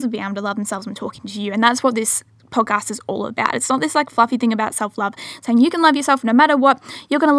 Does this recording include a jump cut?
no; 0 cuts

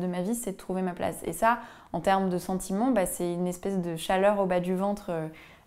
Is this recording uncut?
yes; 0 cuts

